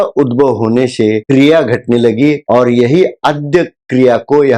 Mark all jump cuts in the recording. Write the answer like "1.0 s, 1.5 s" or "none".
1.2 s

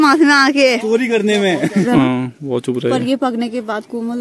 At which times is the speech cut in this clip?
1.9 s

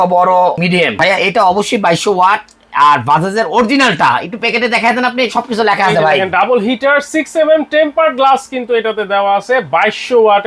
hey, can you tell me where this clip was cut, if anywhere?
1.0 s

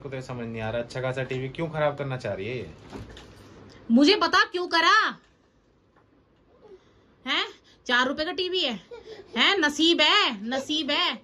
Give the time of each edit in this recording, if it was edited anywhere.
none

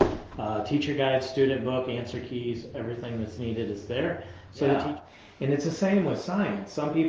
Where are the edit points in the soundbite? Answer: 4.8 s

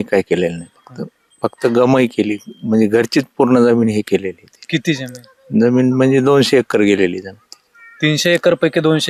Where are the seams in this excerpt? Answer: none

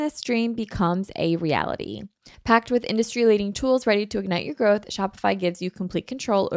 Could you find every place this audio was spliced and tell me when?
2.3 s

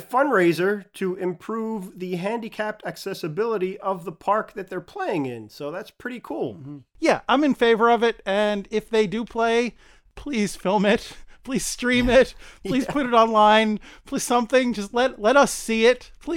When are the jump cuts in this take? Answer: 6.9 s, 10.0 s

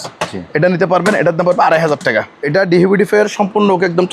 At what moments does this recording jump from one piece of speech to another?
2.4 s

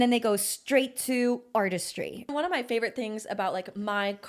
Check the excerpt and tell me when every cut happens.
2.3 s

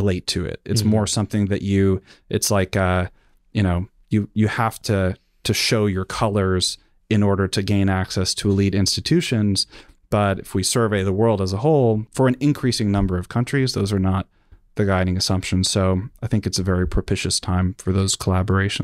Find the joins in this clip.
12.1 s

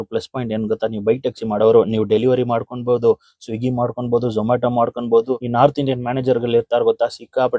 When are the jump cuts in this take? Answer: 5.4 s

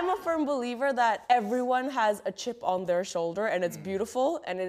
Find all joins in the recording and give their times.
1.2 s

